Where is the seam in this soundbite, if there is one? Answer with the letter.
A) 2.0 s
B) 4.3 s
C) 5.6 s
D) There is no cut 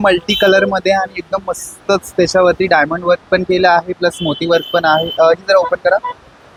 D